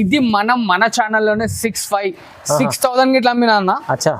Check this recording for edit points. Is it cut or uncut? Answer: uncut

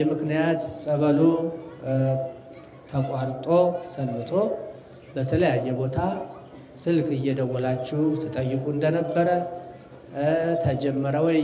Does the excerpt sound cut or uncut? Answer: uncut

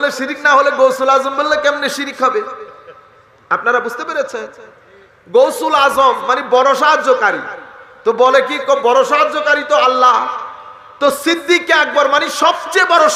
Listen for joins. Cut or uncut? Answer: uncut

